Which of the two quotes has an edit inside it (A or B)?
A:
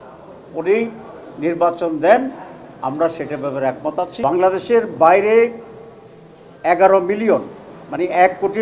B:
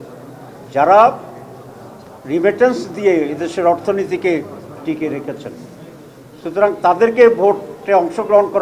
A